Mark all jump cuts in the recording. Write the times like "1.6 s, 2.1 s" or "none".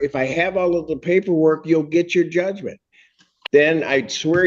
3.3 s

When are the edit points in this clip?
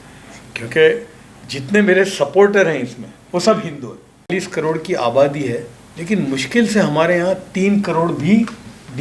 4.3 s

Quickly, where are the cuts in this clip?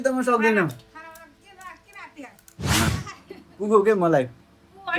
2.9 s

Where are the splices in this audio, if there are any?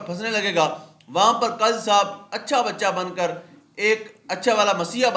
none

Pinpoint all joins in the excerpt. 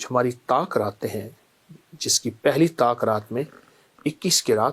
none

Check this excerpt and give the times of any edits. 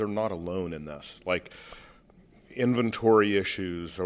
none

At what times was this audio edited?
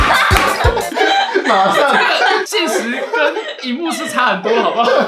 none

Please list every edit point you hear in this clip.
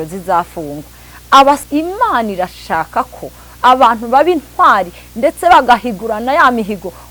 1.6 s

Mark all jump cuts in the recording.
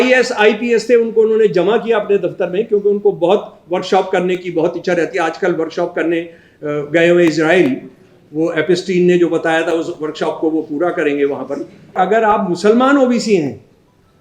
12.0 s

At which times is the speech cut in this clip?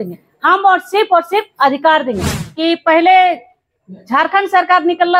2.3 s

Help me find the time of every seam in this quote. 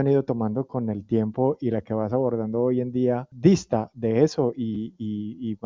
3.3 s

